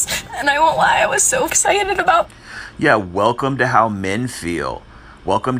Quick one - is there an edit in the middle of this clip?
no; 0 cuts

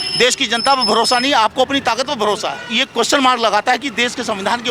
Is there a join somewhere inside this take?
yes; 1 cut; at 2.6 s

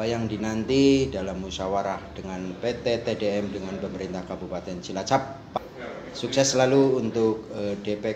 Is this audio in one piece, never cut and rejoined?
no; 1 cut; at 5.4 s

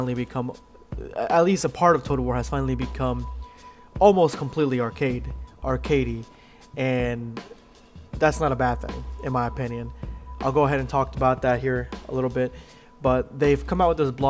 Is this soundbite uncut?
yes; 0 cuts

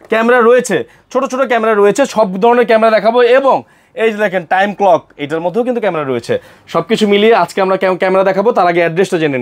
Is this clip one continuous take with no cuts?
yes; 0 cuts

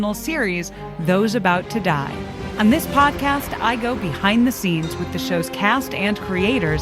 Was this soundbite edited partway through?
yes; 1 cut; at 2.4 s

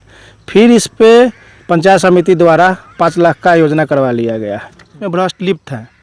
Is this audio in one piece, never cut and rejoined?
no; 1 cut; at 5.0 s

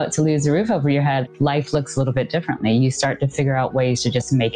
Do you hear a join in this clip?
no; 0 cuts

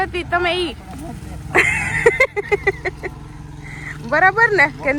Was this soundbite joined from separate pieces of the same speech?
no; 0 cuts

